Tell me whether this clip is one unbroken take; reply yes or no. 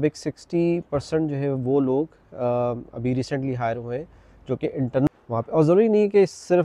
no